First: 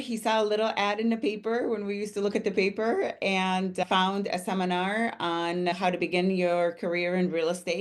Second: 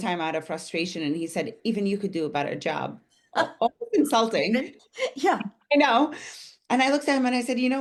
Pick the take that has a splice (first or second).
first